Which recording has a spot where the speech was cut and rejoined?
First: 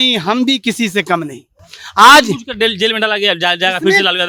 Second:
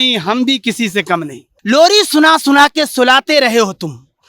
second; 1 cut; at 1.5 s

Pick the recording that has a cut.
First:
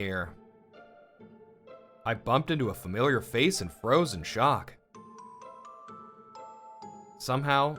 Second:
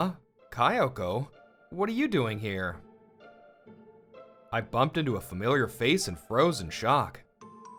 first; 1 cut; at 6.6 s

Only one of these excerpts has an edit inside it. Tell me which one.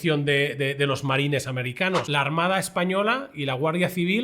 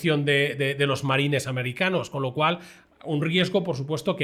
first; 1 cut; at 2.1 s

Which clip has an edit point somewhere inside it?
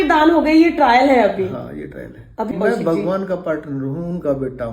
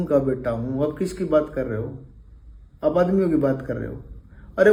first; 1 cut; at 2.5 s

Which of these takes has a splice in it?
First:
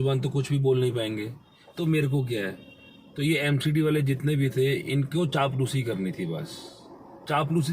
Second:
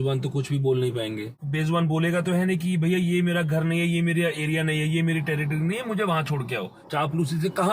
second; 2 cuts; at 1.4 s, 6.8 s

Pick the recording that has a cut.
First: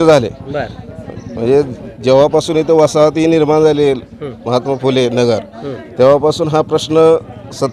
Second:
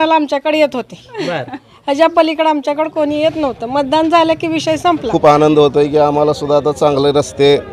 second; 1 cut; at 5.1 s

